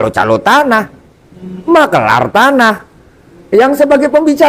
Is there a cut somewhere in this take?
no; 0 cuts

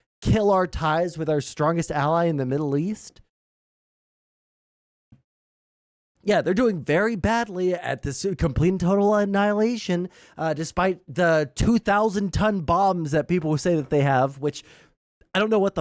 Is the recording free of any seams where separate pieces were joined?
yes; 0 cuts

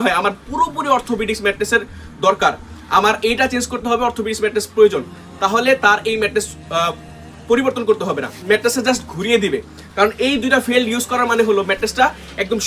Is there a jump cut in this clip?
no; 0 cuts

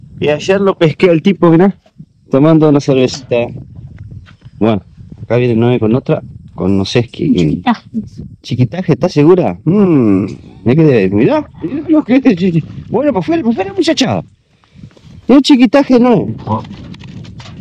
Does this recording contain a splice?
no; 0 cuts

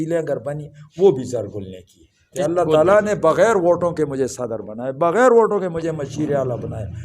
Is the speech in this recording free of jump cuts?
no; 1 cut; at 2.3 s

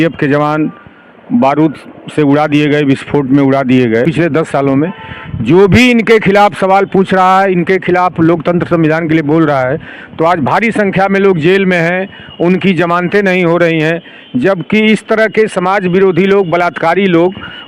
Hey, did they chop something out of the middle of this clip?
yes; 1 cut; at 4.0 s

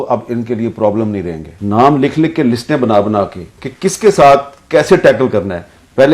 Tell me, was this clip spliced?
yes; 1 cut; at 1.5 s

